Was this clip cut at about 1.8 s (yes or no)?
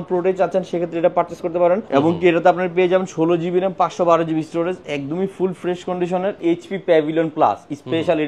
yes